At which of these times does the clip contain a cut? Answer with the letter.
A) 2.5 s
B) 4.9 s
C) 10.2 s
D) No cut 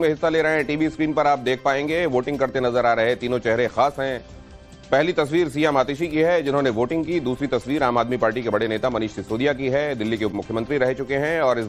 D